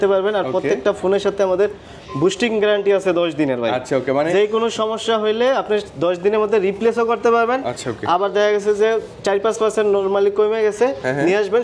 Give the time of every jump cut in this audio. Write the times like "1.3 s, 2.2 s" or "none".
none